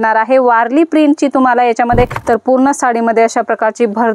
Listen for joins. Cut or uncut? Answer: cut